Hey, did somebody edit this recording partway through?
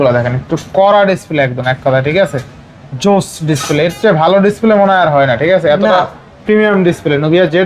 no; 0 cuts

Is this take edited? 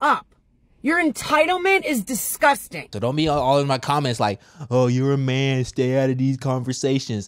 yes; 1 cut; at 2.9 s

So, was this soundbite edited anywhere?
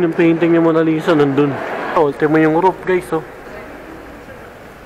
yes; 1 cut; at 1.9 s

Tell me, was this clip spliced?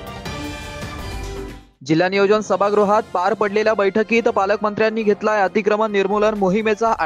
yes; 1 cut; at 1.3 s

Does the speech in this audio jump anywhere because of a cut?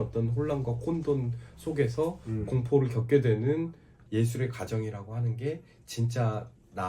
yes; 1 cut; at 4.0 s

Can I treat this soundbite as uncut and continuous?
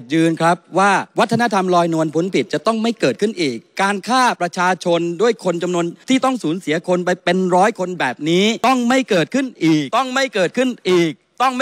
no; 5 cuts; at 1.1 s, 6.0 s, 7.2 s, 8.6 s, 9.9 s

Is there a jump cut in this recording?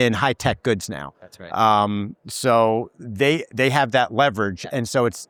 no; 0 cuts

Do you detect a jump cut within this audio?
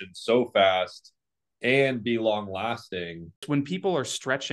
yes; 1 cut; at 3.4 s

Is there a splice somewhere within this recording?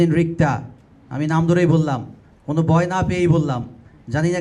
no; 0 cuts

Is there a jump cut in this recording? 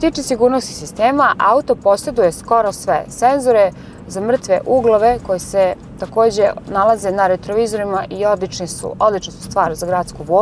no; 0 cuts

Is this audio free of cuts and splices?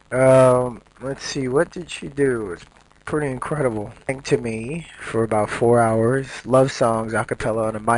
yes; 0 cuts

